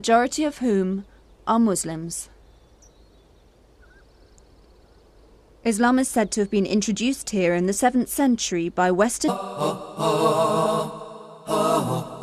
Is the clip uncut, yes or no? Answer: yes